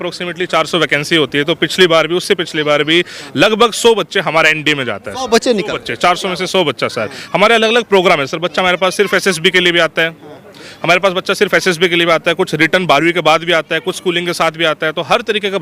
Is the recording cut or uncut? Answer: uncut